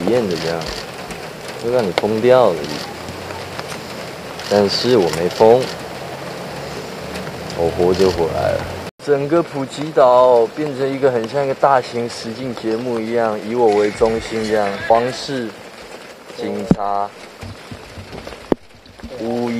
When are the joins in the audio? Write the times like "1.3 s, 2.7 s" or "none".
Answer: 8.8 s, 14.9 s